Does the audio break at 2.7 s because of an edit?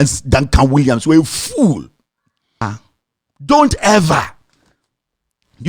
yes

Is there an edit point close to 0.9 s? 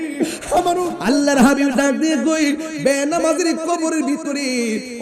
yes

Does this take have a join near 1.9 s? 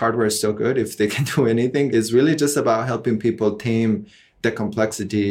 yes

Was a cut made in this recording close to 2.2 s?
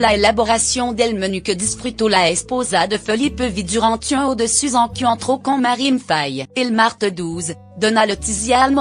yes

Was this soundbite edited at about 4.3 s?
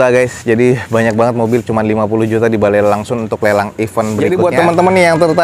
yes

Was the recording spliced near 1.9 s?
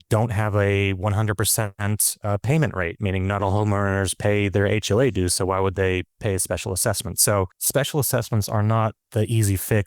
no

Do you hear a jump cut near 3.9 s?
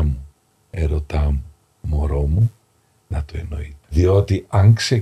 yes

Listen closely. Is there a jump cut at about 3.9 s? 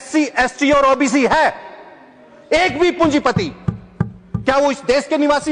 no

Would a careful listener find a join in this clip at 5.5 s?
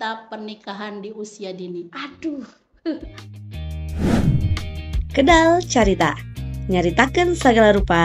no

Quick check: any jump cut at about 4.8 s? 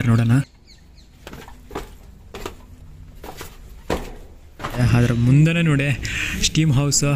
yes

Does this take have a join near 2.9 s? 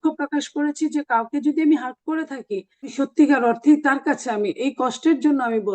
yes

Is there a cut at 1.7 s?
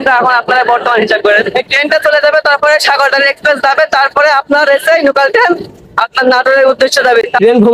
yes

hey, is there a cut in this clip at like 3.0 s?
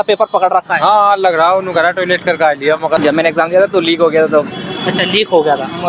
yes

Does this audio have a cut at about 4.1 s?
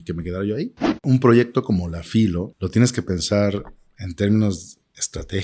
no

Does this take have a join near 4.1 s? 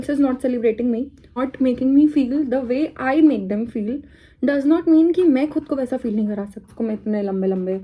no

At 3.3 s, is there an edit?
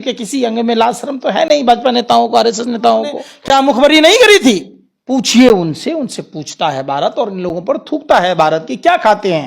yes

